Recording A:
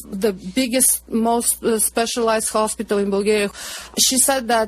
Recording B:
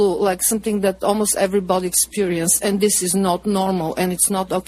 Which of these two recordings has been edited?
A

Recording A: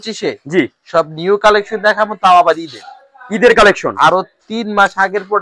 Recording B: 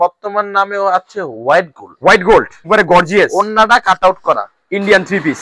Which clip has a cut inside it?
B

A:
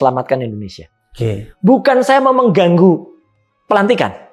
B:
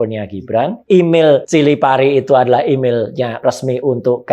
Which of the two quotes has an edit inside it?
B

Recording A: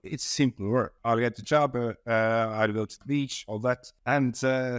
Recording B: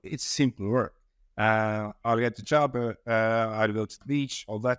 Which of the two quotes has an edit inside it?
A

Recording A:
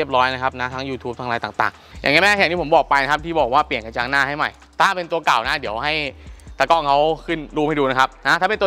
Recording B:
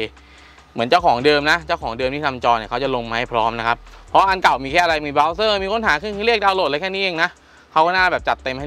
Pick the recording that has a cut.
A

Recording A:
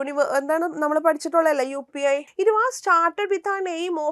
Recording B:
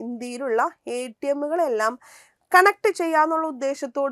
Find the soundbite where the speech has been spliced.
A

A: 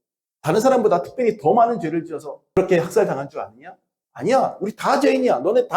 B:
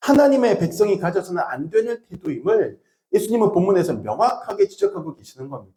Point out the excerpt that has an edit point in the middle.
A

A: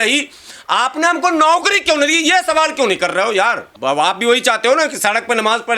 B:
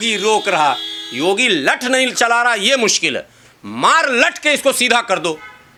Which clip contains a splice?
A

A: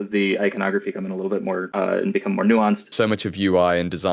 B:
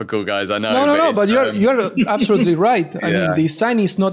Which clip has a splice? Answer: A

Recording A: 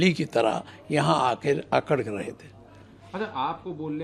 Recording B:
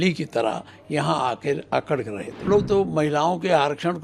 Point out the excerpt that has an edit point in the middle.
B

